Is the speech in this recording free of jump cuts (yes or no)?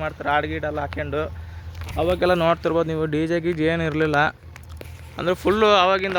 yes